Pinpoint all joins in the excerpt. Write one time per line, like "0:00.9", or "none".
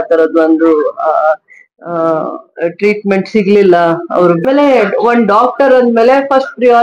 0:04.4